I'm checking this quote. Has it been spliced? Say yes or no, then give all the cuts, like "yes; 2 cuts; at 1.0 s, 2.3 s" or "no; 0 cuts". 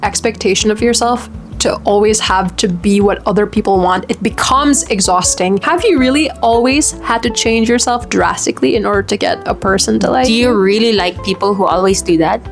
yes; 1 cut; at 5.6 s